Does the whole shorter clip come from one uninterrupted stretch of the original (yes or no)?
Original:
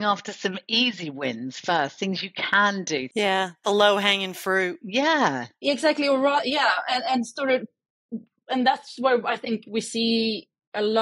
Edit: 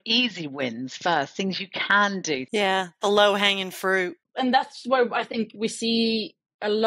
no